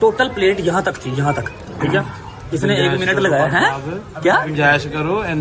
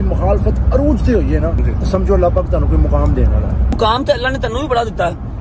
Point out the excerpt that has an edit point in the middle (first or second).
second